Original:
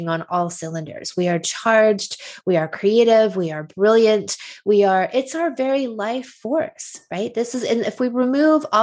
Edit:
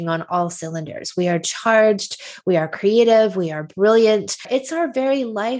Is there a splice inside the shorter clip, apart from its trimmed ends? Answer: yes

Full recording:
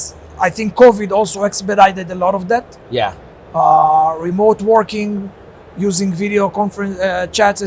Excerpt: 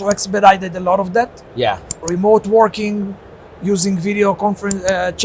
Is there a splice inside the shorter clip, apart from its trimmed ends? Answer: yes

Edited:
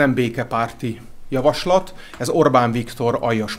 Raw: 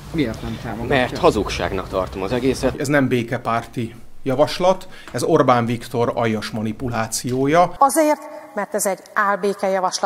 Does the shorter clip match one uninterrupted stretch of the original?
yes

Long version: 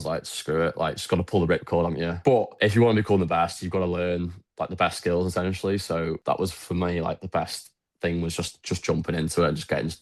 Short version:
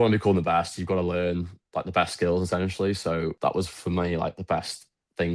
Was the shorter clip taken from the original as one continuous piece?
yes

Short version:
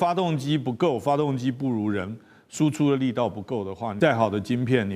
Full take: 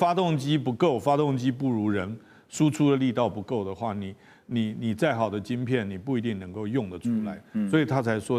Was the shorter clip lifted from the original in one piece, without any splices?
no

